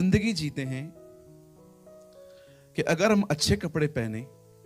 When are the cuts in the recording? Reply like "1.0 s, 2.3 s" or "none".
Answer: 0.9 s, 2.7 s